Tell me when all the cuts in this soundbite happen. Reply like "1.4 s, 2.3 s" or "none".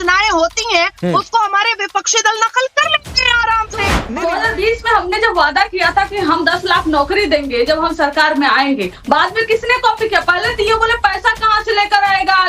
4.0 s